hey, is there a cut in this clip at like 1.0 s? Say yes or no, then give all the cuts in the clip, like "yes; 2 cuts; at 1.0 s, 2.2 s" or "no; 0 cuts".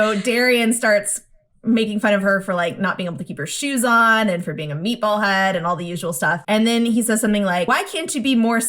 no; 2 cuts; at 6.4 s, 7.7 s